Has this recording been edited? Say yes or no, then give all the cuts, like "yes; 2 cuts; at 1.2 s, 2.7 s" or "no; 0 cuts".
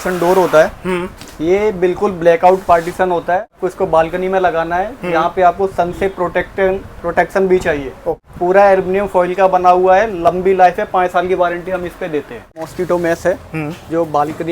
yes; 3 cuts; at 3.6 s, 8.1 s, 12.6 s